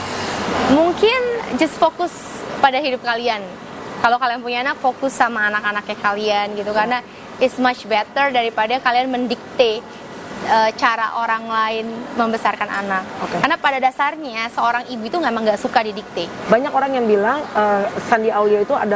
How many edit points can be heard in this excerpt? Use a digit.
1